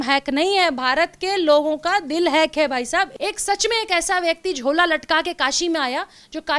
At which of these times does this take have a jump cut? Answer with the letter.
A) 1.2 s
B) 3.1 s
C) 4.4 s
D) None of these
B